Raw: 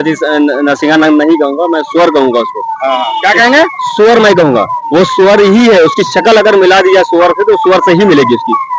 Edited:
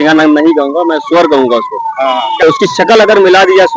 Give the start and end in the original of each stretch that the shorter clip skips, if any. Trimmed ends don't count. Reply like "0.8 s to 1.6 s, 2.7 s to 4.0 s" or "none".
3.3 s to 5.8 s